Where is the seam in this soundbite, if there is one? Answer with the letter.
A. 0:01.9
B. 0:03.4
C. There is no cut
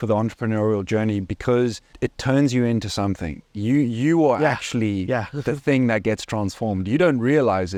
C